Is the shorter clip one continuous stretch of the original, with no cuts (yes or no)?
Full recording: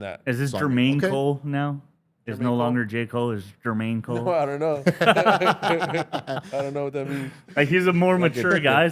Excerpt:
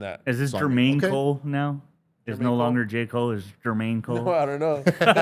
yes